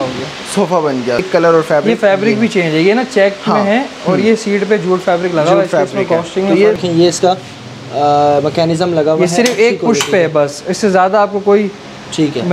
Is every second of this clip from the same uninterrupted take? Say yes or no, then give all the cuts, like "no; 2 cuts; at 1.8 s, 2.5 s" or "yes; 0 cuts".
no; 2 cuts; at 1.2 s, 6.8 s